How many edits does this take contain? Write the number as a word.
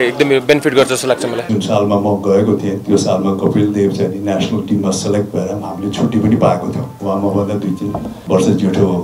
three